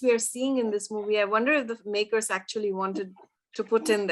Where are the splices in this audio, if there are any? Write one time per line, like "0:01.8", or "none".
none